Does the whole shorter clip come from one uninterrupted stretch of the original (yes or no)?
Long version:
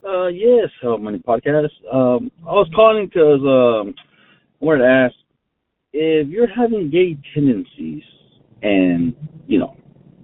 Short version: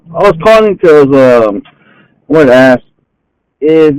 yes